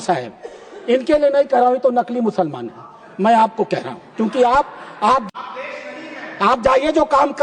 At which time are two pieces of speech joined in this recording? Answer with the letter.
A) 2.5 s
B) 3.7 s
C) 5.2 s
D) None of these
C